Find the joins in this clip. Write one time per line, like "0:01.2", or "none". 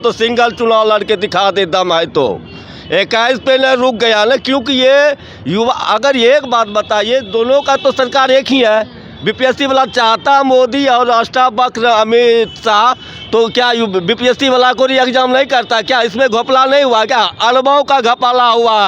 none